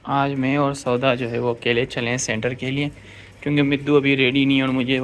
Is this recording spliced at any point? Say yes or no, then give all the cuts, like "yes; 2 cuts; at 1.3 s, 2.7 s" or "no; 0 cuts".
no; 0 cuts